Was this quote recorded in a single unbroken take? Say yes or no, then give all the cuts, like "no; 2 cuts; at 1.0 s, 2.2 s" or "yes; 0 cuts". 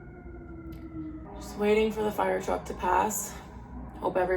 no; 1 cut; at 1.2 s